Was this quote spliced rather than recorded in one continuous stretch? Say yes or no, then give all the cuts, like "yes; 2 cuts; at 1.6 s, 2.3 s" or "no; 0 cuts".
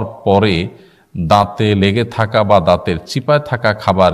no; 0 cuts